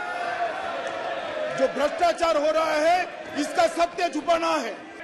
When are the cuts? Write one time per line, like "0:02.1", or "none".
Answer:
none